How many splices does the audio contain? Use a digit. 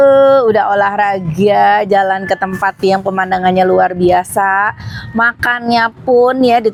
0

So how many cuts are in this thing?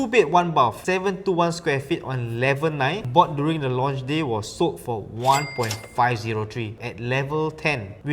3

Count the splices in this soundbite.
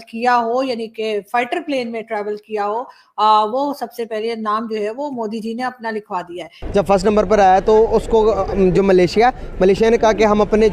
1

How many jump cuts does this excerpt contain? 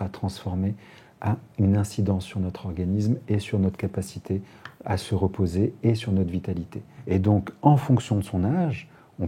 1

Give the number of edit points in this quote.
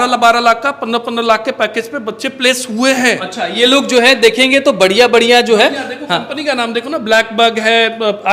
0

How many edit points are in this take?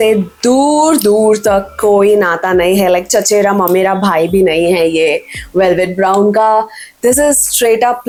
0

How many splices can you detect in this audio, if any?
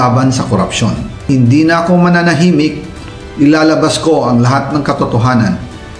1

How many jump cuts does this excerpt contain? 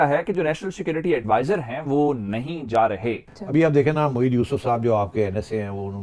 1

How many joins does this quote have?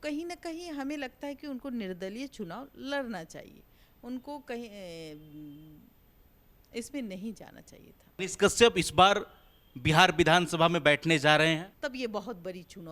2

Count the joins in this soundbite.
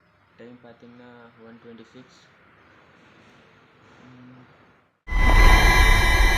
1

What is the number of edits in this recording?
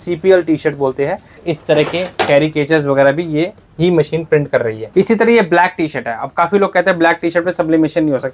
2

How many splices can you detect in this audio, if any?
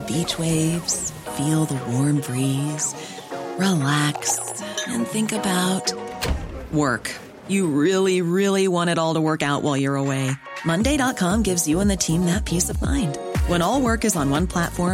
0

